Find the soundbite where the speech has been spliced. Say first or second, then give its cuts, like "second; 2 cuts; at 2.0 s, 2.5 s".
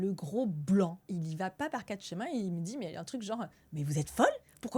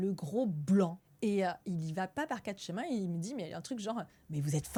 first; 1 cut; at 1.1 s